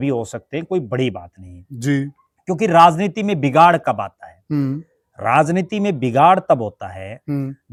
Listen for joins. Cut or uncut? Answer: uncut